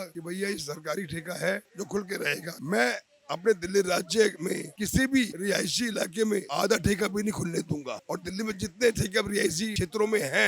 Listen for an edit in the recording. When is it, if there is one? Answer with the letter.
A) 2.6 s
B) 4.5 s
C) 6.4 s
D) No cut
A